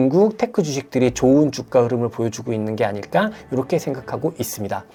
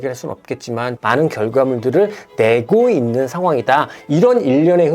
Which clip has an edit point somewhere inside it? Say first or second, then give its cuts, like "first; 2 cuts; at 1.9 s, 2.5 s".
second; 2 cuts; at 0.9 s, 4.0 s